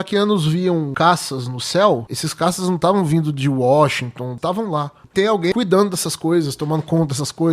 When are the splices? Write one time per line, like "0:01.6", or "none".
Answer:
0:00.9
0:02.2
0:04.3
0:05.5